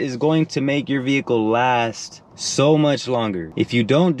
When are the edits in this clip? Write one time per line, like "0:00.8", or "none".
none